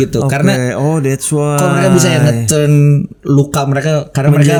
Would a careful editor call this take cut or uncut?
uncut